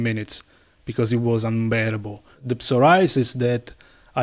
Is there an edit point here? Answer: yes; 1 cut; at 2.5 s

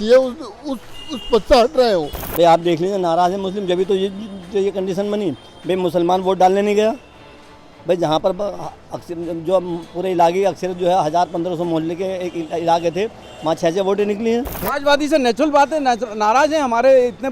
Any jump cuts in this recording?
yes; 2 cuts; at 2.2 s, 14.6 s

